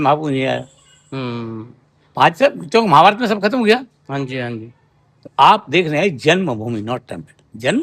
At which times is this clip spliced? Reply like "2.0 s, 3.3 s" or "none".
none